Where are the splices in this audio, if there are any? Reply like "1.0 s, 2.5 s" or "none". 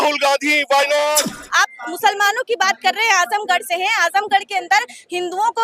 1.3 s